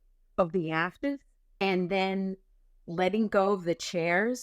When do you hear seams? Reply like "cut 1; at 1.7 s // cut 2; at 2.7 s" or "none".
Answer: cut 1; at 1.6 s